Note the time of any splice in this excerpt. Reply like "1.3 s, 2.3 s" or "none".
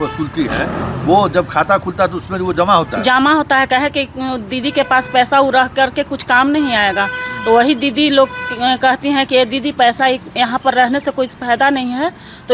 none